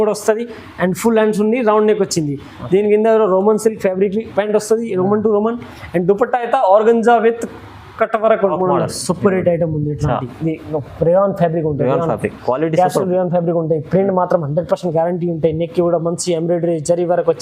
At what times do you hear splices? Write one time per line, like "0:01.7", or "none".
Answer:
0:08.5